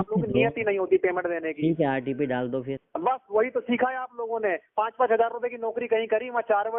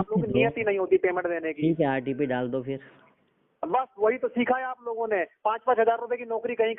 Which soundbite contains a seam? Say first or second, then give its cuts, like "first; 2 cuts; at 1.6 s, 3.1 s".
first; 1 cut; at 2.8 s